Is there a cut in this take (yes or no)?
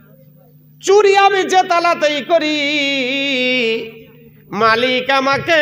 no